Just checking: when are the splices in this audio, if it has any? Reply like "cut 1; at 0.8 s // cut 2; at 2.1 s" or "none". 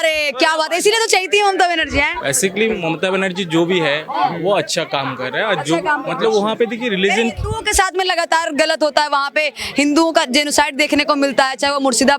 none